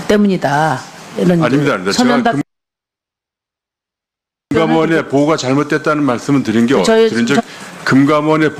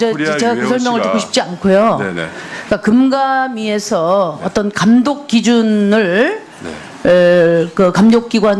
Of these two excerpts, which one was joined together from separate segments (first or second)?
second